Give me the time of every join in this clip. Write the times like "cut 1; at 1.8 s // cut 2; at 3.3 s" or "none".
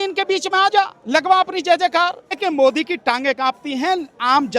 cut 1; at 2.4 s